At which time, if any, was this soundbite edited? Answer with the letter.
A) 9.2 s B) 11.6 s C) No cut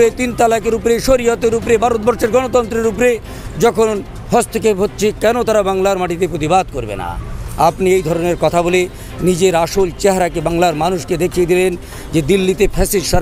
C